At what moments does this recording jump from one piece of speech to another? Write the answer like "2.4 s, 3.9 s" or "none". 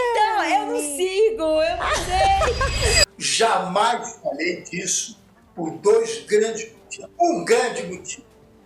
3.1 s

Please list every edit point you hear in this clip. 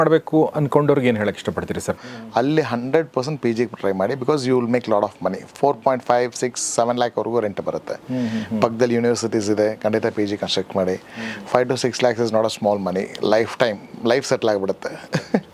2.0 s

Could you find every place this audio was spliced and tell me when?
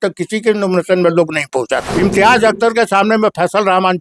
1.9 s

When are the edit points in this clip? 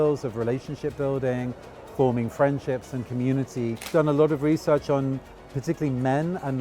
3.8 s

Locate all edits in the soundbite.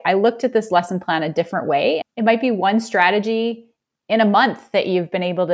2.1 s

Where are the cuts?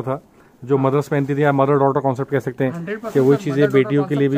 none

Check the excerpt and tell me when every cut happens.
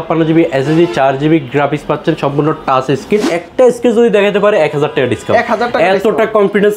3.4 s

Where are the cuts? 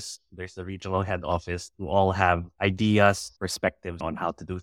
1.2 s, 2.5 s, 3.6 s

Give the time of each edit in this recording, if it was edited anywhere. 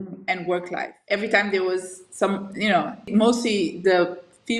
0.9 s, 3.1 s

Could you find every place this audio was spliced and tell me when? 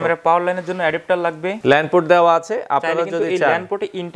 1.5 s

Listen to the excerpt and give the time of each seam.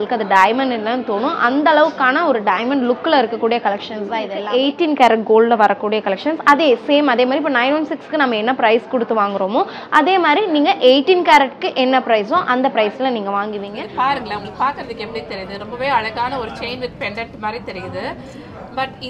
4.4 s, 13.7 s

